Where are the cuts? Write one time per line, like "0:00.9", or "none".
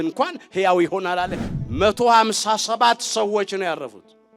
0:01.4